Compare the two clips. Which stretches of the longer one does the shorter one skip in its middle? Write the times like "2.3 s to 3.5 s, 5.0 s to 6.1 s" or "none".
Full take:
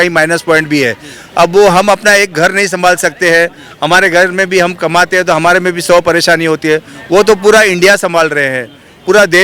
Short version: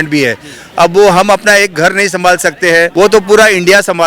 3.5 s to 7.1 s